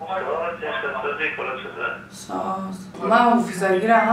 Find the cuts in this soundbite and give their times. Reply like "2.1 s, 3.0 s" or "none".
2.9 s